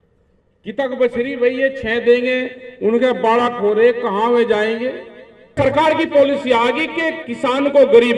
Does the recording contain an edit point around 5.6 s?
yes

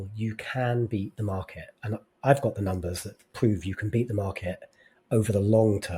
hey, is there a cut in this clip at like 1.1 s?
no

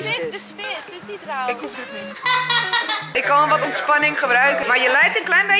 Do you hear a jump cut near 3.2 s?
yes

